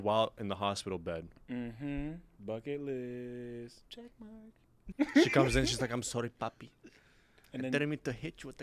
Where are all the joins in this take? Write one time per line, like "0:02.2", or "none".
0:04.8